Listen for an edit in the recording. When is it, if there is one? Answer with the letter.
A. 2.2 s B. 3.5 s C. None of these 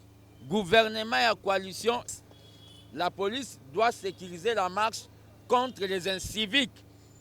A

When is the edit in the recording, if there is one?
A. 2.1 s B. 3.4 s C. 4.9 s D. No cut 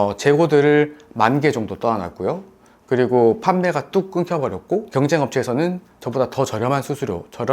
C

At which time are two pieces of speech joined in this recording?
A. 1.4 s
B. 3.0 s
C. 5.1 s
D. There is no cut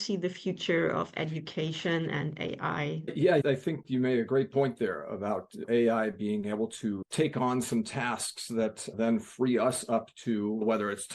B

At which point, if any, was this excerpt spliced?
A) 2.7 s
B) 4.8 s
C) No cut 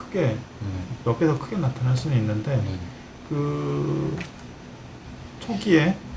C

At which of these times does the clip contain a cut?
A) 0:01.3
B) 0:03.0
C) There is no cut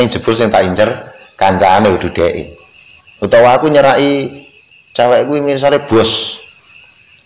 C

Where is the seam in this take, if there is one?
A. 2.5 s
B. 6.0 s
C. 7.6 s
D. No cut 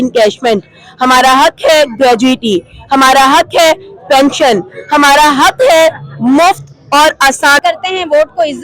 C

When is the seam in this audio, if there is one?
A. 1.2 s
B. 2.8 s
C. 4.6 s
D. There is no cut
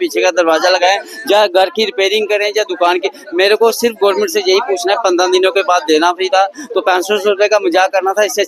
D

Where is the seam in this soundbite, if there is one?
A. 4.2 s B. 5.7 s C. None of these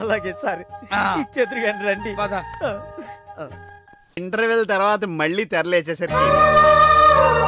A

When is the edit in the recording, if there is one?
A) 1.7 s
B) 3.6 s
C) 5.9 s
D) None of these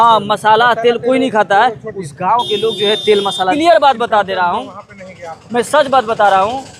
B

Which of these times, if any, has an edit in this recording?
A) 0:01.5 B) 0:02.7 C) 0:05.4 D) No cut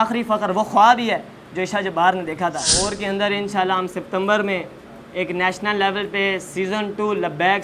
B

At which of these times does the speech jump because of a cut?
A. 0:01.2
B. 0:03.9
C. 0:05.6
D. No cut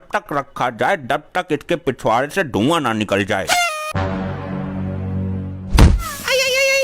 B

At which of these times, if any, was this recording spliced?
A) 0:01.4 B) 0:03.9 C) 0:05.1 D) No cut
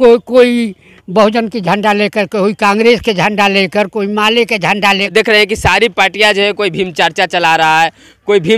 C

